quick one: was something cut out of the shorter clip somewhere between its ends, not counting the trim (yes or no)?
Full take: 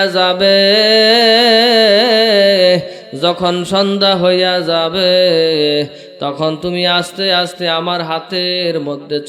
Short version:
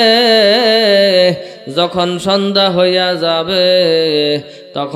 no